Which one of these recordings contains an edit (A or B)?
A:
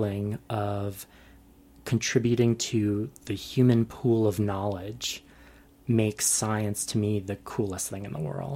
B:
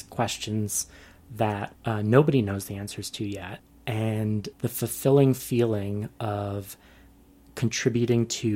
B